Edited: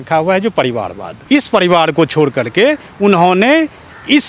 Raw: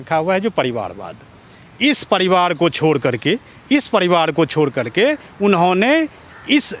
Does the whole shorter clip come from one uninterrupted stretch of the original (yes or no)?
no